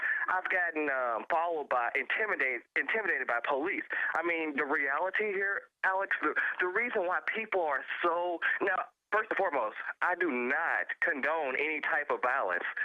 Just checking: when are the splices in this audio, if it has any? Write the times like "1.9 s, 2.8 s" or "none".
9.4 s